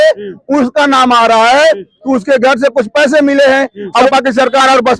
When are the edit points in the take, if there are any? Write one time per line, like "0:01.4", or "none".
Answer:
0:04.1